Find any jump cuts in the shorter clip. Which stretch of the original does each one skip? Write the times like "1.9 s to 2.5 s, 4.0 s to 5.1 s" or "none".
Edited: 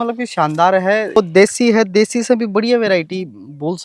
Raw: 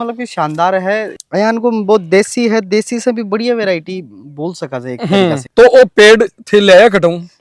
1.2 s to 1.9 s